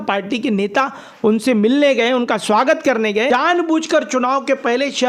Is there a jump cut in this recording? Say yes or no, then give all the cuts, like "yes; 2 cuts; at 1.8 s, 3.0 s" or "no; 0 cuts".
yes; 1 cut; at 3.3 s